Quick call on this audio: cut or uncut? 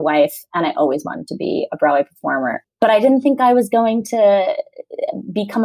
uncut